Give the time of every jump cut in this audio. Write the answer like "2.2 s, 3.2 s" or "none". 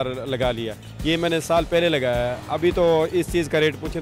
none